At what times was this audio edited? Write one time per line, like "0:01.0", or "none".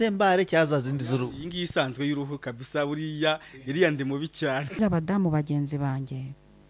0:04.8